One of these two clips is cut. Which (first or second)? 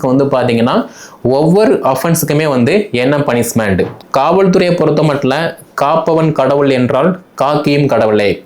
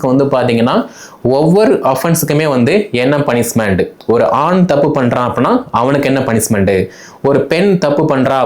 first